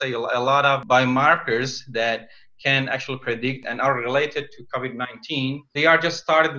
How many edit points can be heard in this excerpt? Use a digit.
1